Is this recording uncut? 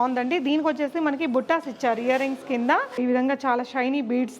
no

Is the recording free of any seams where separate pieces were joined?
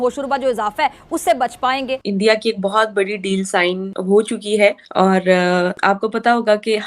no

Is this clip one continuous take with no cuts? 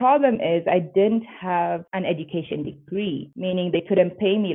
yes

